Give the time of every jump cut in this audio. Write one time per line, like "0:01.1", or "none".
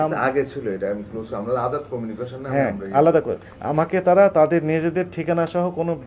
none